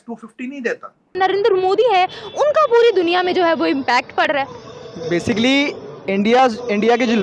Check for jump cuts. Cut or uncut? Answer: cut